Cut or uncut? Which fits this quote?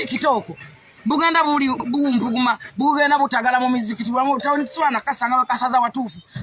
uncut